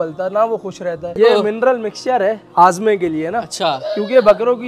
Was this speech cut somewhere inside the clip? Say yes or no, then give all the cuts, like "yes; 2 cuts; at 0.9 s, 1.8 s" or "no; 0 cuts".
yes; 1 cut; at 1.1 s